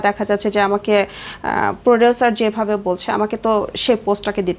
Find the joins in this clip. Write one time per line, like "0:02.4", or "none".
none

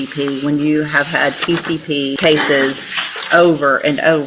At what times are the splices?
0:02.2

